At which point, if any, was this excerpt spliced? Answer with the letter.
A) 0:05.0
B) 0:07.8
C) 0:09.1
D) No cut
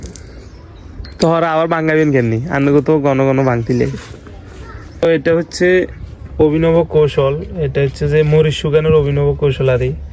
A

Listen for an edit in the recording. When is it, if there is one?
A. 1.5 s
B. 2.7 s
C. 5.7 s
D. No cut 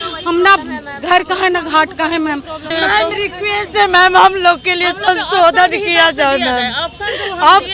B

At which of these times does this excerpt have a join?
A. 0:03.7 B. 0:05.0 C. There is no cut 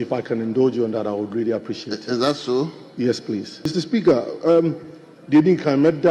A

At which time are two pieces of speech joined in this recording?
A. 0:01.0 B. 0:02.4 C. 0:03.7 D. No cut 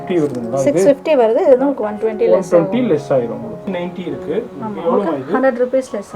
C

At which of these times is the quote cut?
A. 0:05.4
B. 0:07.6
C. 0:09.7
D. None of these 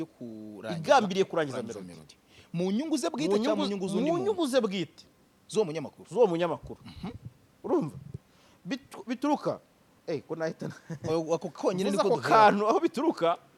D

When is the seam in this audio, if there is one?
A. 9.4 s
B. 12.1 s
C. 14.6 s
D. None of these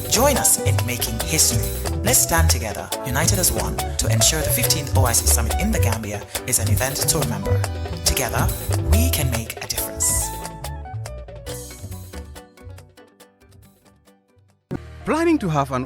C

